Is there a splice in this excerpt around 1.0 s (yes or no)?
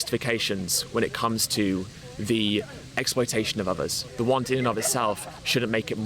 no